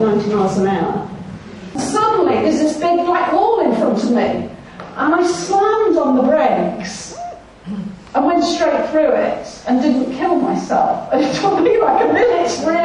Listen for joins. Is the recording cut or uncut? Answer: cut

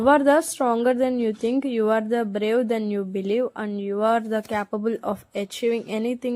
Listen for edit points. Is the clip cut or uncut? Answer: uncut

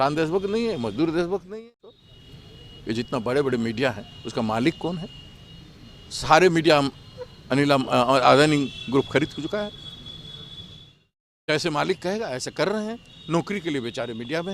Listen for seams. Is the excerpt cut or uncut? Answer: cut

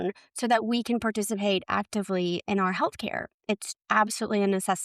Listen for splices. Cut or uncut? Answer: cut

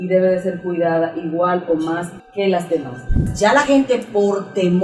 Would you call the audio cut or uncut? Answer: cut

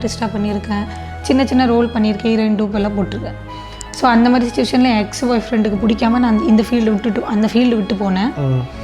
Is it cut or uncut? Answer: uncut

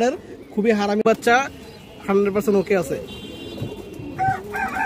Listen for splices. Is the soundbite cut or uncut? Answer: cut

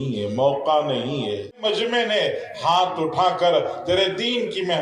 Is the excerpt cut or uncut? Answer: cut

